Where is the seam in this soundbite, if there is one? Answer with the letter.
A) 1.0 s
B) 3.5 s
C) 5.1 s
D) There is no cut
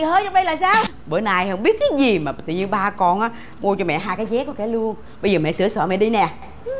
A